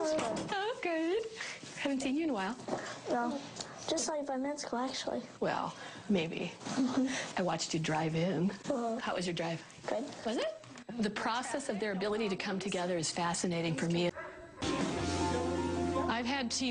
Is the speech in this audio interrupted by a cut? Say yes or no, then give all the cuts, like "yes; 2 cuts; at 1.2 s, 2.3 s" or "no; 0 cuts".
yes; 1 cut; at 14.1 s